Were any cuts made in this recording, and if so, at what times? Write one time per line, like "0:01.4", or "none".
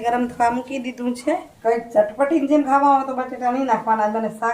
0:01.5